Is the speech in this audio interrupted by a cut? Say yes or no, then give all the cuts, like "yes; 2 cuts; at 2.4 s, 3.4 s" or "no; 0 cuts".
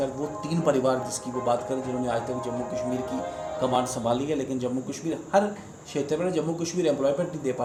no; 0 cuts